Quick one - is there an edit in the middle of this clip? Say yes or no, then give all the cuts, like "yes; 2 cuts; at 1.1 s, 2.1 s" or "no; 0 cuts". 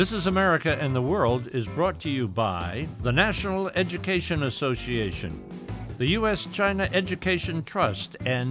yes; 1 cut; at 2.8 s